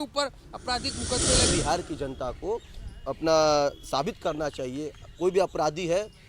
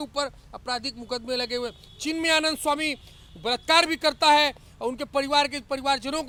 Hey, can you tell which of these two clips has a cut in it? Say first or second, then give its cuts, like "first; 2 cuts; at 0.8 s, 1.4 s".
first; 1 cut; at 1.5 s